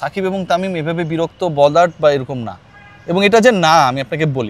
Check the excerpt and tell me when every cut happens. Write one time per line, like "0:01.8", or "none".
none